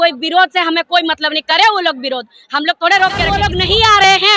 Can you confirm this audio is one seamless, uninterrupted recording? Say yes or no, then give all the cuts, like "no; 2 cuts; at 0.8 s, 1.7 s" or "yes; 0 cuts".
no; 1 cut; at 3.3 s